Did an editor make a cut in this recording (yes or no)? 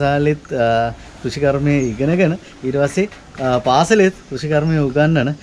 no